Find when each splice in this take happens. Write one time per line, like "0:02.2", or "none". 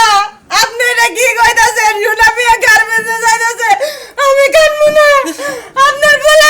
none